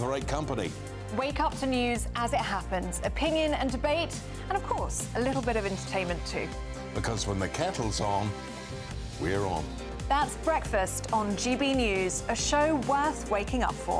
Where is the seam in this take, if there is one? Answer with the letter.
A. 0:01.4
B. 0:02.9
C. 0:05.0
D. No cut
D